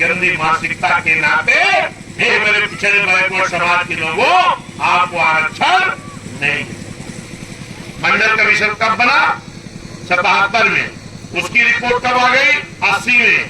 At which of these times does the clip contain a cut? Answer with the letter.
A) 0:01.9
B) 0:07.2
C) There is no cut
B